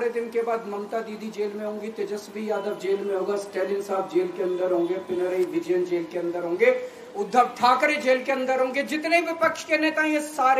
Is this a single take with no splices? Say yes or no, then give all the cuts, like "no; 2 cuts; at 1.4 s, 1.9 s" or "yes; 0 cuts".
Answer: yes; 0 cuts